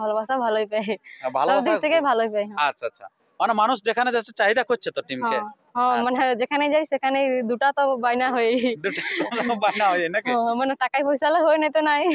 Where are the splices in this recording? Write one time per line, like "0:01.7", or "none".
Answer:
none